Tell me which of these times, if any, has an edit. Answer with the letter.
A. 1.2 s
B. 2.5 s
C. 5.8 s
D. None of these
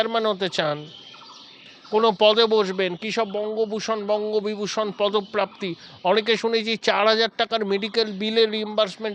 D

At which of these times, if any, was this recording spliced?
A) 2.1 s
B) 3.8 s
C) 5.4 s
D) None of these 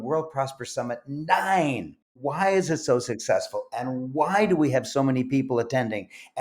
A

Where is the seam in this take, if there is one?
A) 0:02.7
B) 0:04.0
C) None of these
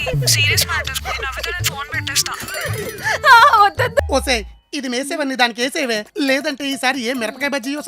B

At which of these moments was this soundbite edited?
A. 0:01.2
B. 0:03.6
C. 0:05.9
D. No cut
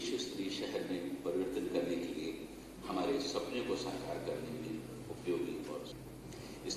C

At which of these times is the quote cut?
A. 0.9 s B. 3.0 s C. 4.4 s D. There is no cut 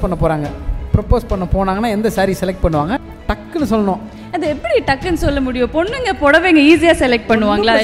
B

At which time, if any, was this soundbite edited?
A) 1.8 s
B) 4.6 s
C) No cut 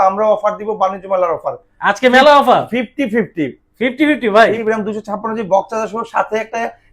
B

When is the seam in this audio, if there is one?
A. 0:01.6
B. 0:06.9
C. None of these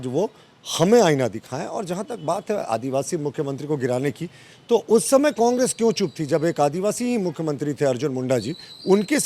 C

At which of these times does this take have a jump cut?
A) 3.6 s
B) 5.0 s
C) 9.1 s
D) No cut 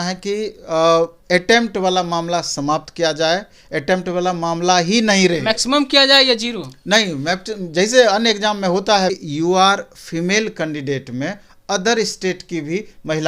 C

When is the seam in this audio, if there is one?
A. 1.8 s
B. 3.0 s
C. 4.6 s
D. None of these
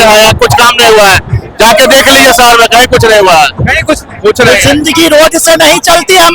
C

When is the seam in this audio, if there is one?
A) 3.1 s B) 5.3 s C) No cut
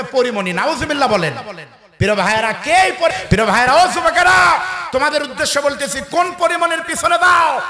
A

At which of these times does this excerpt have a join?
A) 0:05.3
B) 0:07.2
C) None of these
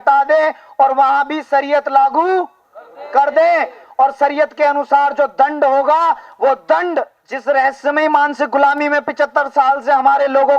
B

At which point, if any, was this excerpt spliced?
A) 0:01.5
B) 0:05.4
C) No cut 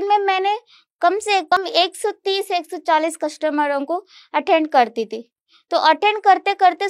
A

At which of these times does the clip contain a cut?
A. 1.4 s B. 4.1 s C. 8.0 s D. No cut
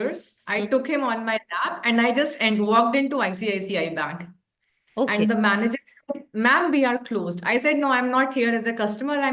D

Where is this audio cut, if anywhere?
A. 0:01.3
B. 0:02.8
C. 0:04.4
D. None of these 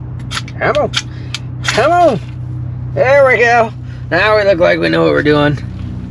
D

